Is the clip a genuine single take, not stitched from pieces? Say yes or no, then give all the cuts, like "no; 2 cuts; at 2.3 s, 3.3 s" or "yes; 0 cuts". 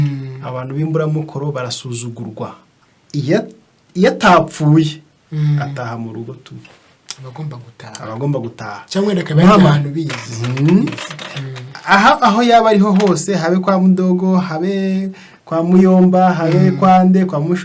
no; 1 cut; at 2.7 s